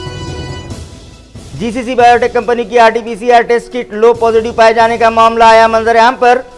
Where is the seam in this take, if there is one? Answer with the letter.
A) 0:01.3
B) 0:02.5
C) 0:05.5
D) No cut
A